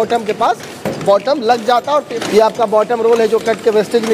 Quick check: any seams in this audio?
yes; 1 cut; at 2.1 s

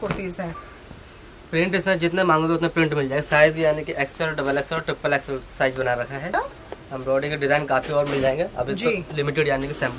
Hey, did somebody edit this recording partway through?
yes; 1 cut; at 6.3 s

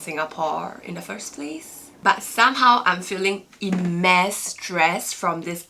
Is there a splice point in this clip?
no; 0 cuts

